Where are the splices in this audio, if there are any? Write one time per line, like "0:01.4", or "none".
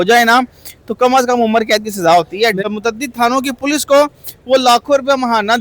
0:02.6